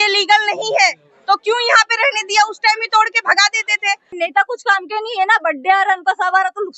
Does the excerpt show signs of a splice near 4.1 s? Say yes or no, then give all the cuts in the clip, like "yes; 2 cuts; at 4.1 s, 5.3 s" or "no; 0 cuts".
yes; 1 cut; at 4.1 s